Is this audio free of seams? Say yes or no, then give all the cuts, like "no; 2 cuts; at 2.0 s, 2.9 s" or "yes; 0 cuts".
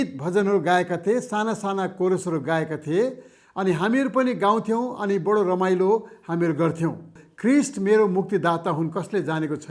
no; 1 cut; at 7.2 s